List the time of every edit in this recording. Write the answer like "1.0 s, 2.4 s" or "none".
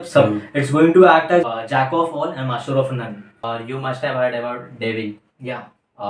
3.4 s